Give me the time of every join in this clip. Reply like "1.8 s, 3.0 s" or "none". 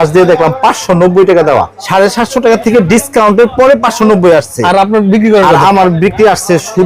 1.8 s